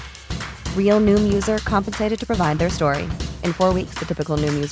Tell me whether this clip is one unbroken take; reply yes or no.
yes